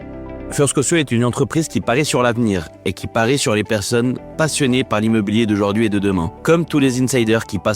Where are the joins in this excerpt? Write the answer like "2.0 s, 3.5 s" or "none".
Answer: 6.3 s